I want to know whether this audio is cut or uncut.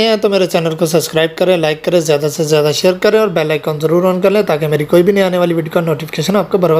uncut